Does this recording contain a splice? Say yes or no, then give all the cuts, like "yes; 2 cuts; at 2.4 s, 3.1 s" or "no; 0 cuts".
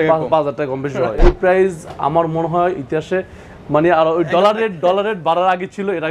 yes; 1 cut; at 1.2 s